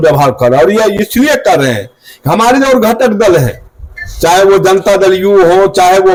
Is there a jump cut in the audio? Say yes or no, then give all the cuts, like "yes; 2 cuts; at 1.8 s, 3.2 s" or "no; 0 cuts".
no; 0 cuts